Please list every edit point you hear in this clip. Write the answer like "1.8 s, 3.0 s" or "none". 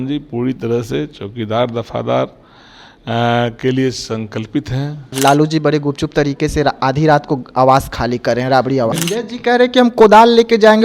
5.1 s, 8.9 s